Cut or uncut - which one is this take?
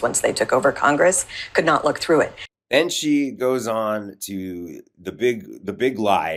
uncut